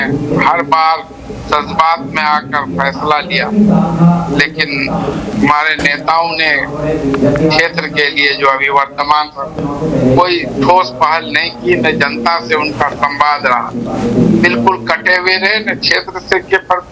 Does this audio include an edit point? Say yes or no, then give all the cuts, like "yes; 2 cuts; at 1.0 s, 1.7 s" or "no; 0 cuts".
no; 0 cuts